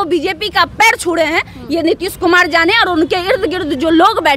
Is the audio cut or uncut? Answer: uncut